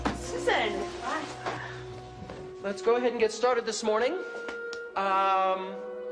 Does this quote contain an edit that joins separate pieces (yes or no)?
yes